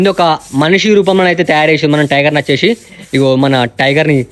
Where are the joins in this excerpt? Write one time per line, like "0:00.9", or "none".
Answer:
none